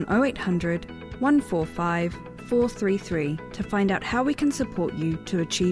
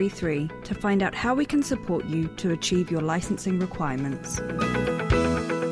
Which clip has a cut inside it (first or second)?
second